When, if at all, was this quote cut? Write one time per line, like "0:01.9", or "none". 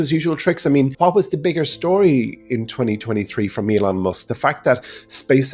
0:00.9